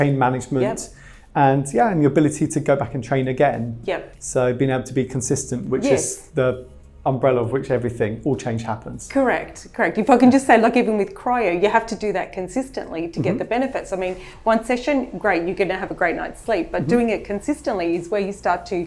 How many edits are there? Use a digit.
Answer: 0